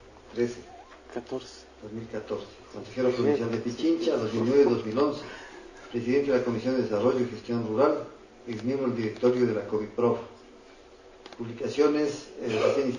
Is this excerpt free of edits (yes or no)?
no